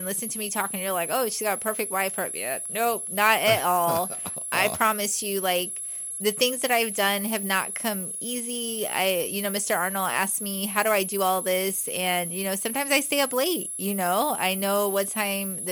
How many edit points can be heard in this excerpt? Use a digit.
0